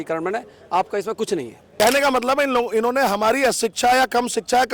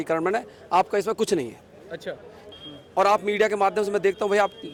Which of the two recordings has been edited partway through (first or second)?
first